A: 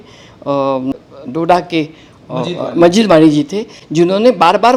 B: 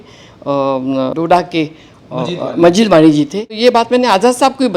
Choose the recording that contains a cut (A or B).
B